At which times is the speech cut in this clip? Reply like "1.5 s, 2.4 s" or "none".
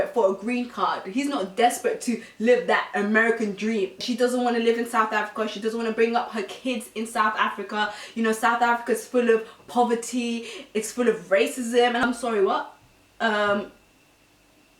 4.0 s